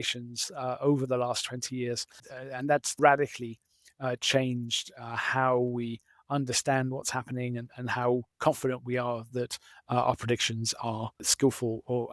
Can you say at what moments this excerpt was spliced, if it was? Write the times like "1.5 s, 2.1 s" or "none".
2.4 s, 11.2 s